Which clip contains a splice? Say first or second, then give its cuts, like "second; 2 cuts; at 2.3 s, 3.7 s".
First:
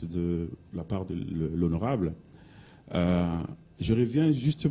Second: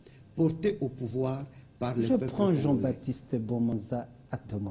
second; 1 cut; at 2.1 s